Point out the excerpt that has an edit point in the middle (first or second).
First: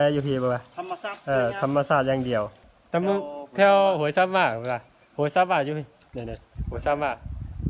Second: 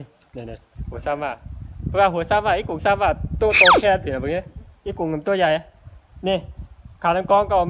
first